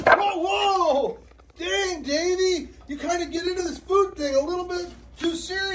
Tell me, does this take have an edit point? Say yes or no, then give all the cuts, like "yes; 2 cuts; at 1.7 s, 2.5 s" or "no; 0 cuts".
no; 0 cuts